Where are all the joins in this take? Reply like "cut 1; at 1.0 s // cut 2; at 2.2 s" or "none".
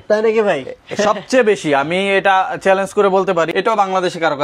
cut 1; at 3.5 s